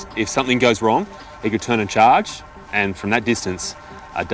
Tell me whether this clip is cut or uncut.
uncut